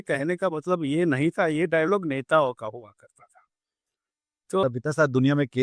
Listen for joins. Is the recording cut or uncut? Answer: cut